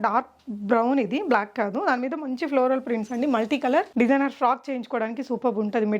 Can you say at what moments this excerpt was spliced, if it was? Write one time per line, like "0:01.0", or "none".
0:03.9